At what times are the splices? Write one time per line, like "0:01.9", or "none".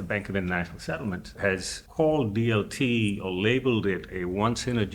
0:01.4